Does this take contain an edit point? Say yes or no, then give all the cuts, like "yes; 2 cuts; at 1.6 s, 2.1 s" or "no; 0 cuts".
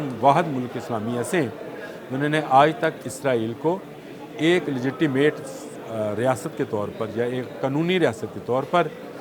no; 0 cuts